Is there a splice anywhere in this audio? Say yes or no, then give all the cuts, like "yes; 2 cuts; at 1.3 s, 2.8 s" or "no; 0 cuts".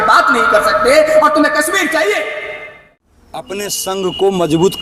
yes; 1 cut; at 3.1 s